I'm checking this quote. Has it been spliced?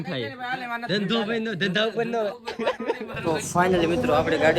yes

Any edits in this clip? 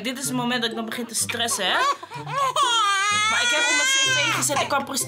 no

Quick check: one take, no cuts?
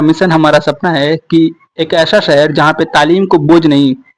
yes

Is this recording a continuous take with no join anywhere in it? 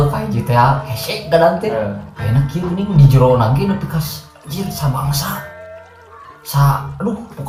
yes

